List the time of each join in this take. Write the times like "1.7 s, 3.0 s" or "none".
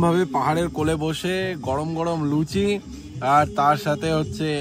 none